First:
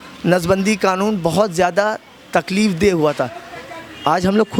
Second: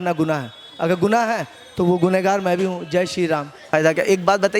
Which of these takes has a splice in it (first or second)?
second